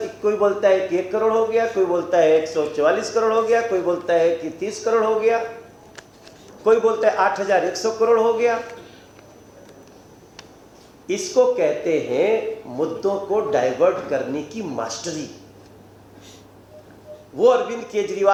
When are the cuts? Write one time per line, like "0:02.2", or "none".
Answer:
none